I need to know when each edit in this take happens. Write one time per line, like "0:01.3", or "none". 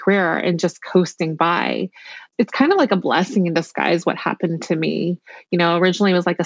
0:02.3